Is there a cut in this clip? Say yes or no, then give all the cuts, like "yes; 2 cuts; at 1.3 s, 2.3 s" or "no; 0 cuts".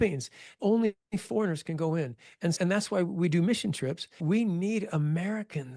yes; 1 cut; at 4.1 s